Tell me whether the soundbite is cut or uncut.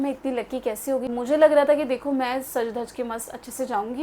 cut